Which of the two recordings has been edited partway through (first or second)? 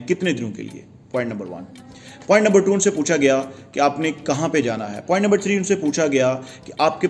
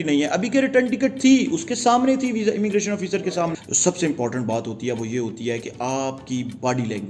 second